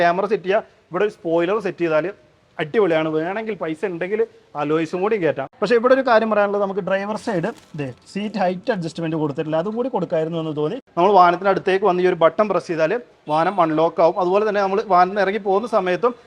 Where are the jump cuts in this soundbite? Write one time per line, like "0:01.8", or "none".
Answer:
0:05.5
0:10.8

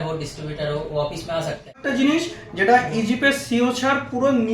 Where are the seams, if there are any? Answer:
0:01.8

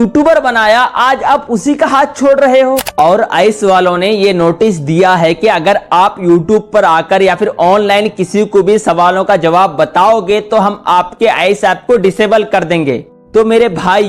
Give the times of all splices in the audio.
0:02.8

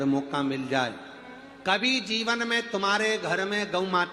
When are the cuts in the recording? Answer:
0:02.2

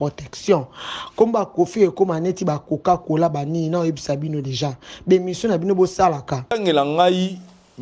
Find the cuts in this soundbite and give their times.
0:06.6

